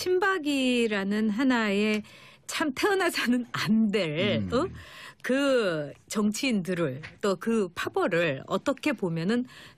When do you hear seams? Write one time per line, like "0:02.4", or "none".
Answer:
0:05.8